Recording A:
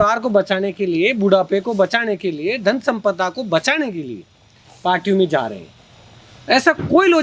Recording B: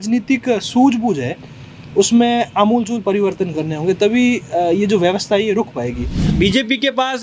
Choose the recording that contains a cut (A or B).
B